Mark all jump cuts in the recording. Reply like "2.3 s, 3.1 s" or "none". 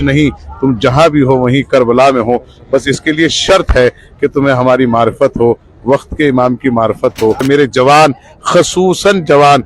7.4 s